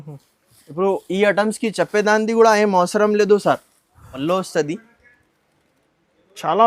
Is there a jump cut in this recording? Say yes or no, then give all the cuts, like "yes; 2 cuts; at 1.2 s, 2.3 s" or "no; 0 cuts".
yes; 1 cut; at 4.1 s